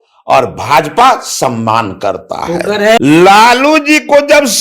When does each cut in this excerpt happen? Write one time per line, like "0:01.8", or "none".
0:03.0